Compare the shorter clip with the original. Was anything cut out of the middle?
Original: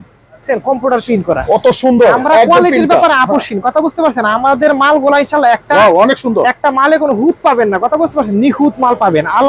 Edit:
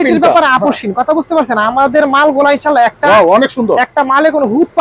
no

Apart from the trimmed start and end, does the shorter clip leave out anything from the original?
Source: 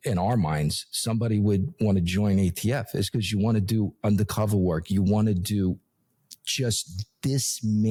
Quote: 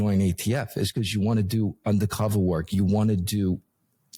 no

